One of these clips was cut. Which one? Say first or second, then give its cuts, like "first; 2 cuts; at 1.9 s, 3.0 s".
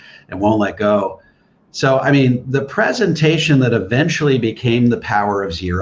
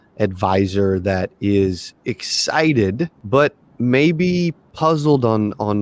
second; 2 cuts; at 3.2 s, 4.6 s